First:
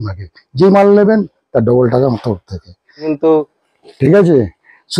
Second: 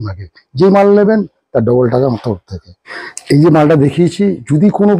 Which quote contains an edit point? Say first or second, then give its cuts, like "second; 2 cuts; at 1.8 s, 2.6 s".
first; 1 cut; at 3.1 s